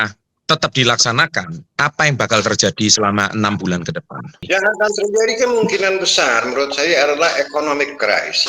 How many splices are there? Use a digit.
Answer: 2